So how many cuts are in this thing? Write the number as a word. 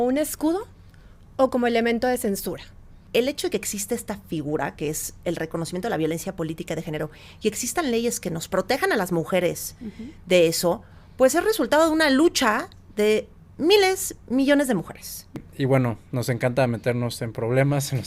two